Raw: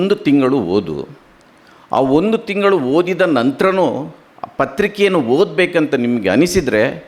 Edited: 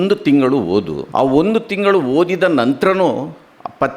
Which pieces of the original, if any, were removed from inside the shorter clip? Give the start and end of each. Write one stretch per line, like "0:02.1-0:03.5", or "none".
0:01.0-0:01.8